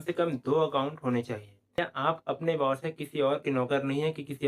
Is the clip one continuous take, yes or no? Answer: no